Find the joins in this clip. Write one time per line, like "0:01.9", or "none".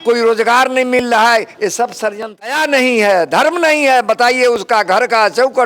0:02.5